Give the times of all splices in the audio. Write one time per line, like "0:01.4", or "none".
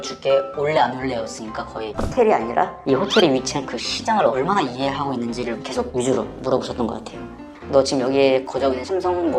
0:02.1
0:07.5